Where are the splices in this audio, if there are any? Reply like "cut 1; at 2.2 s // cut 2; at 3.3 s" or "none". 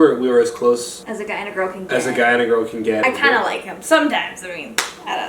cut 1; at 1.0 s // cut 2; at 3.0 s